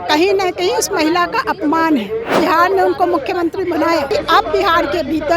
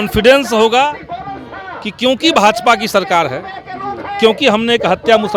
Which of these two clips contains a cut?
first; 2 cuts; at 2.4 s, 4.1 s

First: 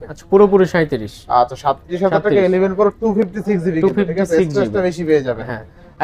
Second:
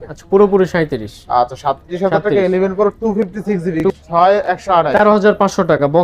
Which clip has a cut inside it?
second; 1 cut; at 3.8 s

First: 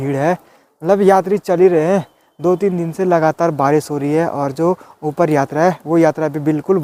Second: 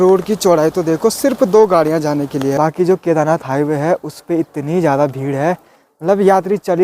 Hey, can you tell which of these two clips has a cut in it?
second; 1 cut; at 2.5 s

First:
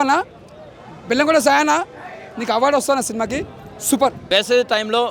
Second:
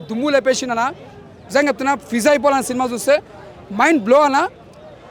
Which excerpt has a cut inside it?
first; 1 cut; at 4.2 s

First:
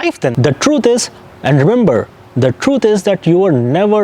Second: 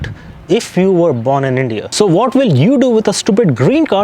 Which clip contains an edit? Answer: second; 1 cut; at 1.9 s

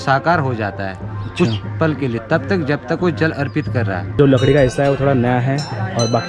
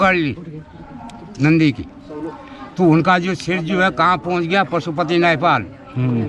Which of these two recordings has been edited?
first; 1 cut; at 4.1 s

